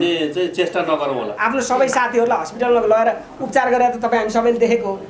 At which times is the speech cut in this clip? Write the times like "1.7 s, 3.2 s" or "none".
1.3 s